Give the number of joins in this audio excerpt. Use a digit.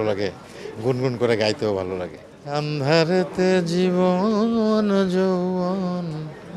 1